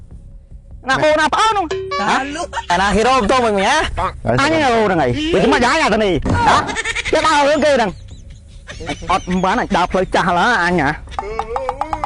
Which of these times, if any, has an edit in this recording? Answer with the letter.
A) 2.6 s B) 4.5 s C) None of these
A